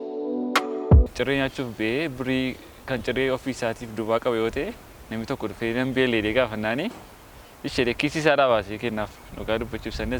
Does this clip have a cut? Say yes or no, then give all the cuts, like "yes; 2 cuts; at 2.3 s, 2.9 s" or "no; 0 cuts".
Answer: yes; 1 cut; at 1.1 s